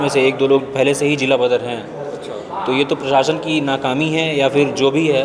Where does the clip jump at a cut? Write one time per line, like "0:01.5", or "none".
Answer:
none

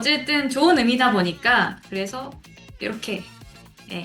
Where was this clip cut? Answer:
0:01.8

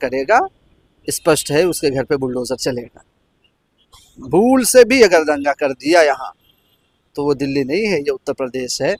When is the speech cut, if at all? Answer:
none

